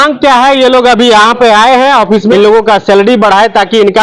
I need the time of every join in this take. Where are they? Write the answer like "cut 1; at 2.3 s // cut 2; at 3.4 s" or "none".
cut 1; at 2.2 s